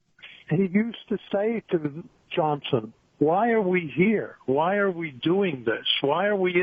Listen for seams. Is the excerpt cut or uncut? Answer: uncut